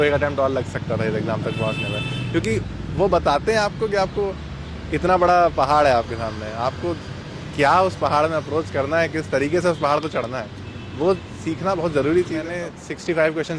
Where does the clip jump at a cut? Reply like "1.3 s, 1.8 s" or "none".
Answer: 12.5 s